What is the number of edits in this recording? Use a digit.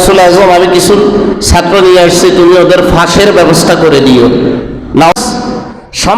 1